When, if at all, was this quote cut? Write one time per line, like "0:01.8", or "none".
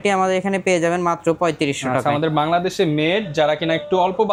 none